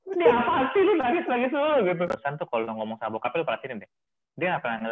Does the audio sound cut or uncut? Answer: cut